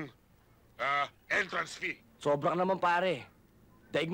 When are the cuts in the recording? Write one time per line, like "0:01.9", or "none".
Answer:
0:02.1